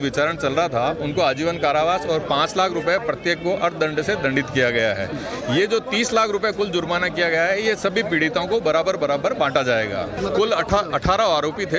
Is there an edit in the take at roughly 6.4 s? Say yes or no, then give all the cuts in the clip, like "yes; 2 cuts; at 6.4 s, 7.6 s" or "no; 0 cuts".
no; 1 cut; at 2.5 s